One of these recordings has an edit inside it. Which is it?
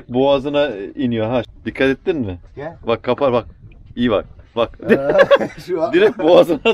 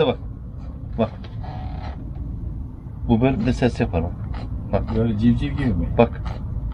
first; 1 cut; at 1.5 s

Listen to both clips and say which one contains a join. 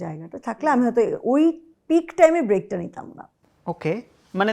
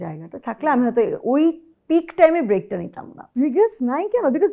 second; 1 cut; at 3.2 s

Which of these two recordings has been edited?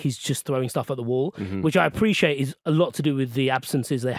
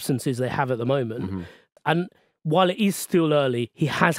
second; 1 cut; at 1.8 s

